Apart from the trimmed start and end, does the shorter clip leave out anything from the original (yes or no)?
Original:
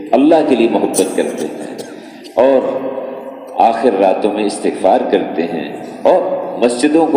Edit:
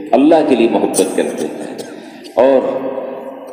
no